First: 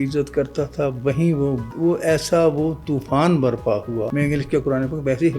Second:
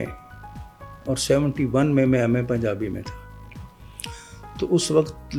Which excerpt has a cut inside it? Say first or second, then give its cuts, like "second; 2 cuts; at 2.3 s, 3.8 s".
first; 1 cut; at 4.1 s